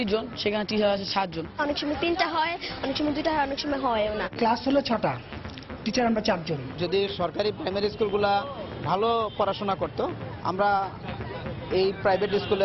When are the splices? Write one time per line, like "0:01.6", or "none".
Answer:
0:01.5
0:06.7